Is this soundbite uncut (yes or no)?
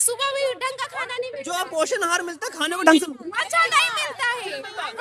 yes